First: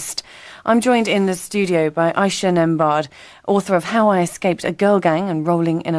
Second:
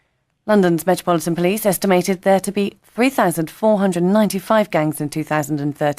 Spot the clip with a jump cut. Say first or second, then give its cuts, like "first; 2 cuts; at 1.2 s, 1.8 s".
second; 1 cut; at 3.5 s